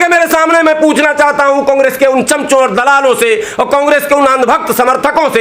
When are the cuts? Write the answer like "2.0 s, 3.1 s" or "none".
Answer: none